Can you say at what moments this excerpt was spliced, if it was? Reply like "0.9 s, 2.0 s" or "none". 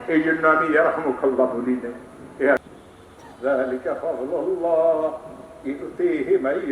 2.6 s